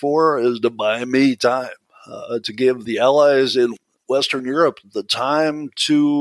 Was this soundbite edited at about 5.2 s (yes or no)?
no